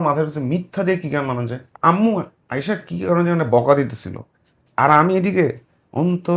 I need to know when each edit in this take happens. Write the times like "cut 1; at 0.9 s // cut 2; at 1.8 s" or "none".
cut 1; at 1.6 s